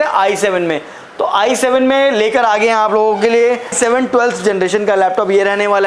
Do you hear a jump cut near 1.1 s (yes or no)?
no